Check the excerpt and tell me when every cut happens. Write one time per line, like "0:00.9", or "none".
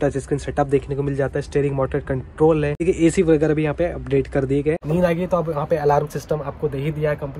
0:02.8
0:04.8